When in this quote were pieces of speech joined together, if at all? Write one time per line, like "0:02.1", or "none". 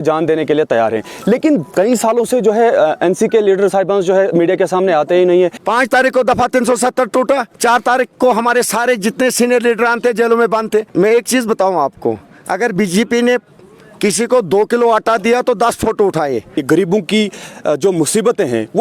0:05.6
0:10.9
0:16.6